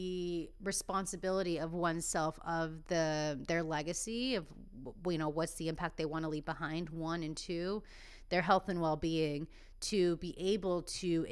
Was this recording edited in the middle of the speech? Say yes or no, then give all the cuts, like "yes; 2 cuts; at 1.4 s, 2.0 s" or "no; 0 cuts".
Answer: no; 0 cuts